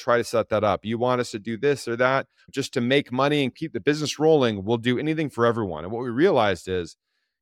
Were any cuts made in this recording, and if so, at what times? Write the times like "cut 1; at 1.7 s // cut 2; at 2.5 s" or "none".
cut 1; at 2.4 s // cut 2; at 3.6 s